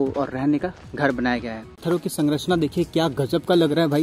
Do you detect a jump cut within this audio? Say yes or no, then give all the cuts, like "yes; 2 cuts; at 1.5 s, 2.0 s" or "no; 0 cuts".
yes; 1 cut; at 1.7 s